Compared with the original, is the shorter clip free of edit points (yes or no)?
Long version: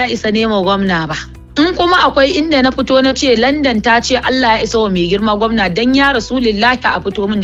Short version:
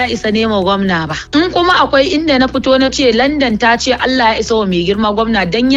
no